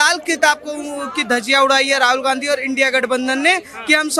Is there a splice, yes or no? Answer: no